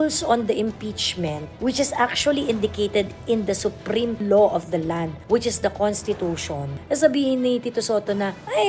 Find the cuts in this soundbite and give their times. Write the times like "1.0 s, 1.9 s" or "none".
4.2 s, 5.1 s